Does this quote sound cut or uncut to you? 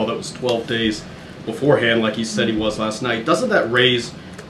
uncut